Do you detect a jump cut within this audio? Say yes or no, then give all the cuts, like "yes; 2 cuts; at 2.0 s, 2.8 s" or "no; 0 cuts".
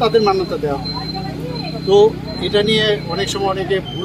no; 0 cuts